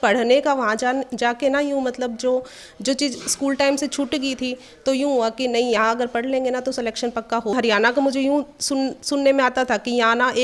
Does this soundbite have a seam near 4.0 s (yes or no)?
no